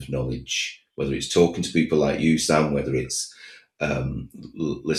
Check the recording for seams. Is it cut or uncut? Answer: uncut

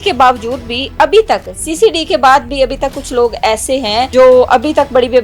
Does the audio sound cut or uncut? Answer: cut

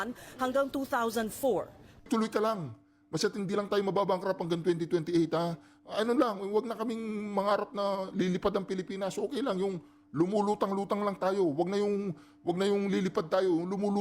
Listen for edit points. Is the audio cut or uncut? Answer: cut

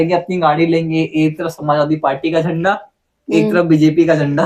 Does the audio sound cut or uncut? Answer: uncut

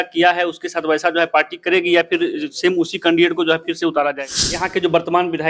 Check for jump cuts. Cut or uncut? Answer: cut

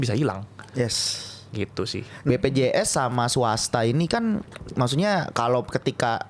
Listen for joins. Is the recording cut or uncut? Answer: cut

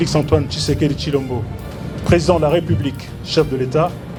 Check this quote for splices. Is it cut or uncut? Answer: uncut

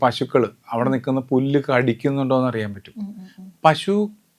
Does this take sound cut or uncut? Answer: uncut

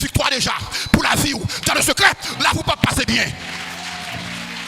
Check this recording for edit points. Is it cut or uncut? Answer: uncut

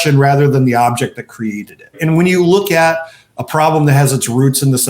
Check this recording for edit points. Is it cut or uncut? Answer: cut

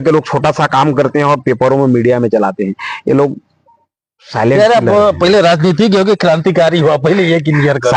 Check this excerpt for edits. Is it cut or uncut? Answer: uncut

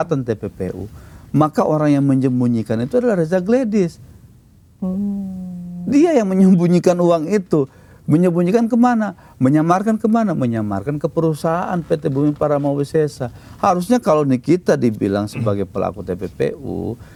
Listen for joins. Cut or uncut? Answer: uncut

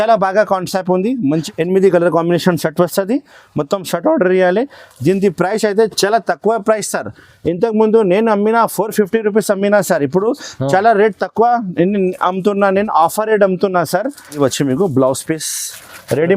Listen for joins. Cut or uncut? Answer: cut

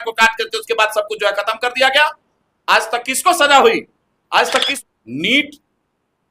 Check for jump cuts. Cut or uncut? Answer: cut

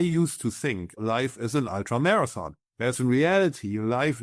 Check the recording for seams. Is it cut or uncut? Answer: cut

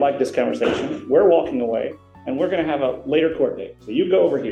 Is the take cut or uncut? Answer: uncut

